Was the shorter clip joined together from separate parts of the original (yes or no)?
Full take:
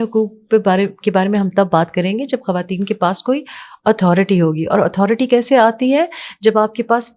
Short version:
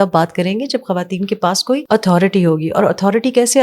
yes